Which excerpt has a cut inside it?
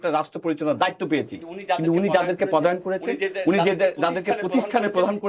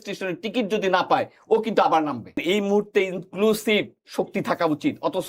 second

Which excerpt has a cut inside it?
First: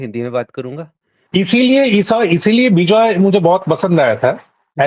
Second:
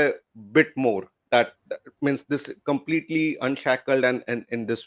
first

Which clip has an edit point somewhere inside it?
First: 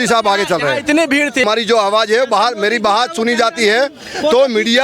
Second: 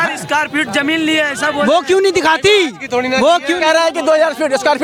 first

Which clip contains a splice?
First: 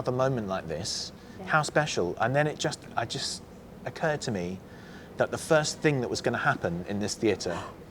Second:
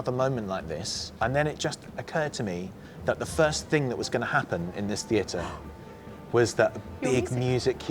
second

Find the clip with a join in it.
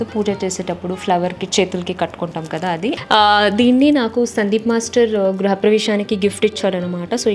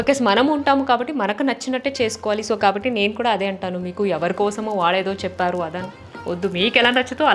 first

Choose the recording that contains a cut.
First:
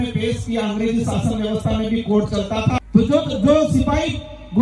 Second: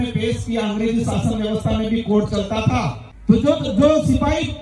first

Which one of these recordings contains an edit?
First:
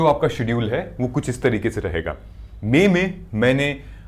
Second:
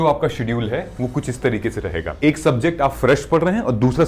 second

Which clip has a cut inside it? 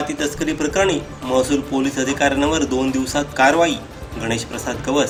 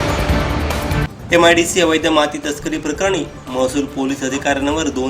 second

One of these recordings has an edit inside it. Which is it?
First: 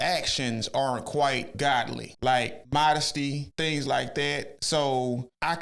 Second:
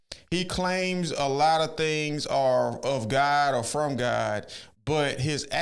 first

